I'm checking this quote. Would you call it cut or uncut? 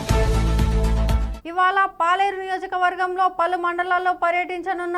uncut